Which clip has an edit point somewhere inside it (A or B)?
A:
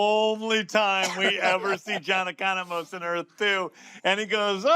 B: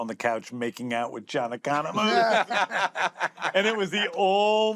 A